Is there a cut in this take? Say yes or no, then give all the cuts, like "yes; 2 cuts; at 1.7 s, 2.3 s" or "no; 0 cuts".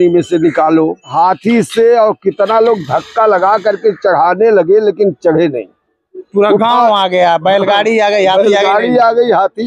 yes; 1 cut; at 1.1 s